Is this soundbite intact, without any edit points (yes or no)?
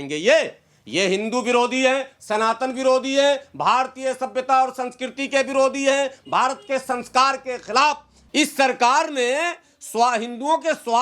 no